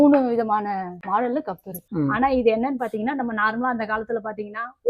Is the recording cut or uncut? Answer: cut